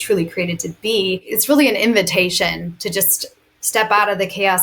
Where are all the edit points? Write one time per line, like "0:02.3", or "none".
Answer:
0:01.3